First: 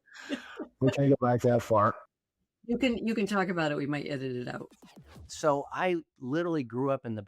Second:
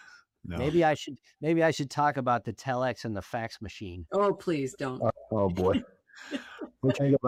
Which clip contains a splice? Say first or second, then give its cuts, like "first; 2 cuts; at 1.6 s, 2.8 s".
first; 1 cut; at 5.1 s